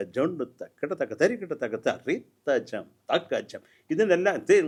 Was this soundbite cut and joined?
no; 0 cuts

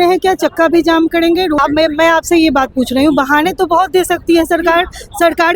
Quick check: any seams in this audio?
yes; 1 cut; at 1.6 s

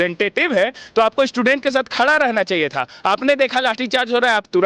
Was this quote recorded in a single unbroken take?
yes; 0 cuts

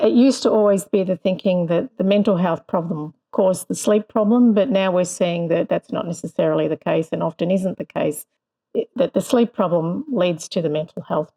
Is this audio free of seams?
yes; 0 cuts

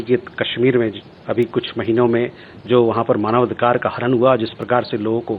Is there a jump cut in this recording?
no; 0 cuts

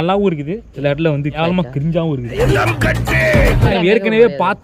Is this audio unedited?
no; 2 cuts; at 2.5 s, 3.7 s

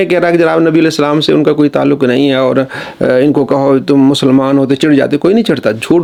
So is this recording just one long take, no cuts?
yes; 0 cuts

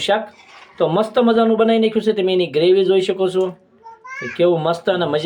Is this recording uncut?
yes; 0 cuts

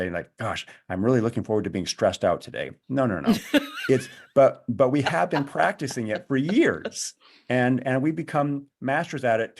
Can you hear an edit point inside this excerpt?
no; 0 cuts

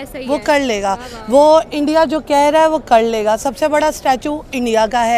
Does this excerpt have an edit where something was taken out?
no; 0 cuts

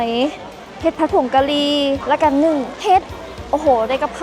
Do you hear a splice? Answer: yes; 2 cuts; at 2.0 s, 2.7 s

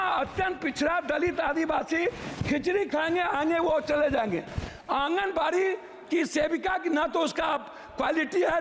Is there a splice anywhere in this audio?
no; 0 cuts

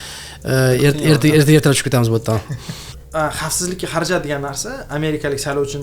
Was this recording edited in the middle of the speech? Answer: yes; 1 cut; at 2.9 s

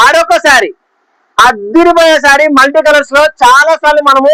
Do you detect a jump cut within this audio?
no; 0 cuts

